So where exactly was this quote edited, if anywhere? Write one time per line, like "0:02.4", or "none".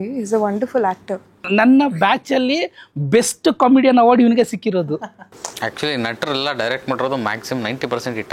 0:01.4
0:05.2